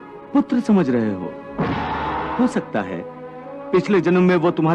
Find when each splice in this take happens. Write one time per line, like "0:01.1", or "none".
0:02.3